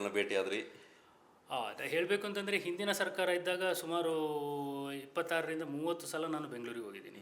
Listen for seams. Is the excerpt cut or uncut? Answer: uncut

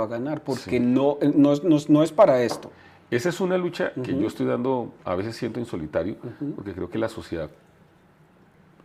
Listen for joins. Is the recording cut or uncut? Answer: uncut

